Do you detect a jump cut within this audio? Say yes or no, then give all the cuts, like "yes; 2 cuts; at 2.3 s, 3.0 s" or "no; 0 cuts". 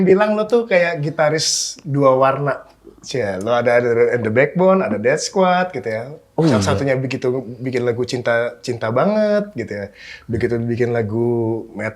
no; 0 cuts